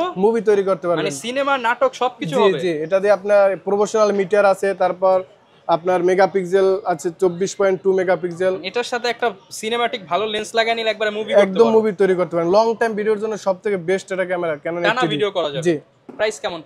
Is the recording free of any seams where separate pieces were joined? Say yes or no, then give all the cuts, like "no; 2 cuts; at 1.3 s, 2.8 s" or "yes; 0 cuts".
yes; 0 cuts